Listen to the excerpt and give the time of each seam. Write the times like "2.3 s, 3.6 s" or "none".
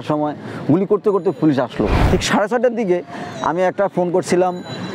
2.0 s

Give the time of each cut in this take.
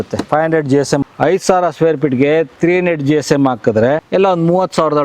1.0 s, 4.0 s

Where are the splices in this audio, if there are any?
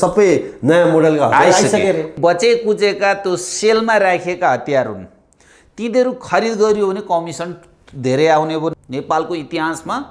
2.1 s, 8.7 s

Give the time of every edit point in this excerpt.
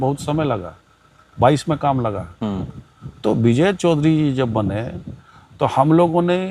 none

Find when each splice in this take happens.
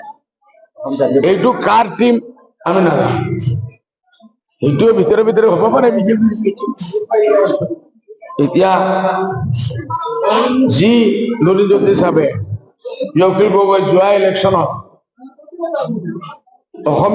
none

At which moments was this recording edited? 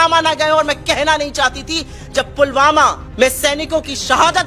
3.0 s

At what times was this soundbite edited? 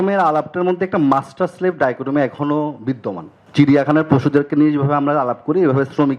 3.4 s

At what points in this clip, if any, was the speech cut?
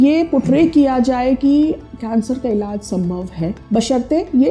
3.6 s

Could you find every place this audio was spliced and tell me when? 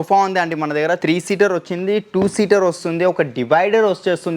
1.0 s

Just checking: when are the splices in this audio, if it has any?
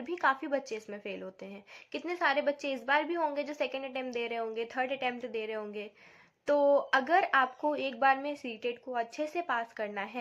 none

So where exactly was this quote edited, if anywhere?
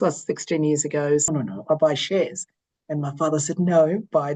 1.3 s

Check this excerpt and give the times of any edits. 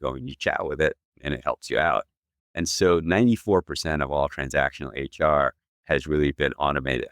2.4 s

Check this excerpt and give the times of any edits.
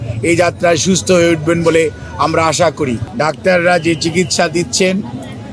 3.1 s

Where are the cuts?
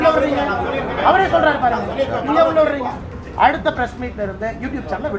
3.1 s

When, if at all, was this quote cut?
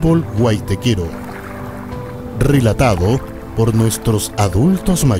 1.1 s, 2.4 s

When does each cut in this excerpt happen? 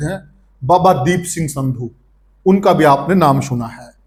none

